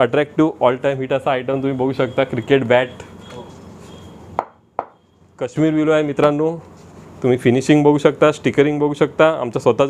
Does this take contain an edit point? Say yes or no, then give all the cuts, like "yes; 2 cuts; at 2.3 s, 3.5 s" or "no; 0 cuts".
no; 0 cuts